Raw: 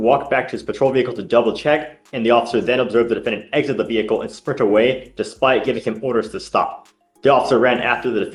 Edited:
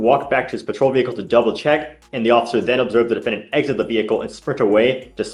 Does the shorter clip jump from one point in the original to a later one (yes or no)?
no